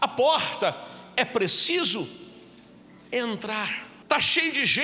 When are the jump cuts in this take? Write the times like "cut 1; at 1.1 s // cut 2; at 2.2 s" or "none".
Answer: cut 1; at 3.9 s